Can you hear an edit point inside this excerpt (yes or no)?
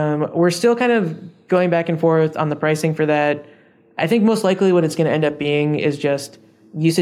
no